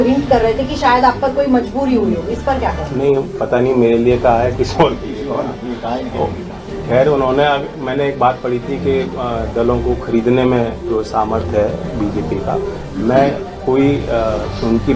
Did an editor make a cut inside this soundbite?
no; 0 cuts

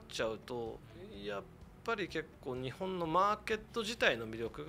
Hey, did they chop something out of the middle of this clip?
no; 0 cuts

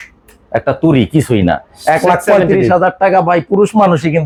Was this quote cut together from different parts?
no; 0 cuts

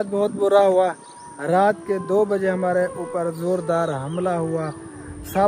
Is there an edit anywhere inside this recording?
no; 0 cuts

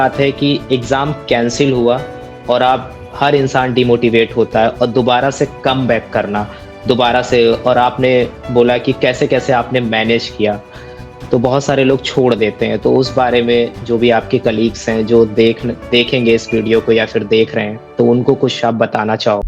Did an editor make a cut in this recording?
no; 0 cuts

